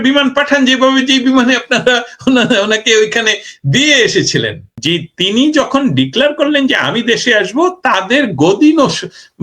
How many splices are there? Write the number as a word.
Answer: zero